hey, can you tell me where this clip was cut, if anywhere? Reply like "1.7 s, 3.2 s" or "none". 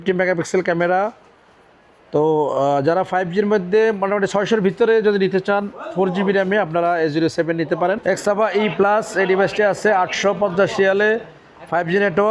8.0 s